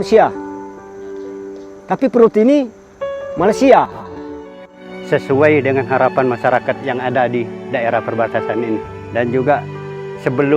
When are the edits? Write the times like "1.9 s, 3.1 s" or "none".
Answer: 4.1 s